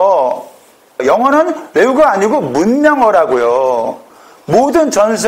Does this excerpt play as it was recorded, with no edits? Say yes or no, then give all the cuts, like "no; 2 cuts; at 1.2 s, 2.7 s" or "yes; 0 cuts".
no; 1 cut; at 1.0 s